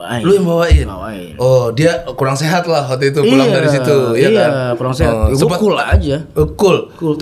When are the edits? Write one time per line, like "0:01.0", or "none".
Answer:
none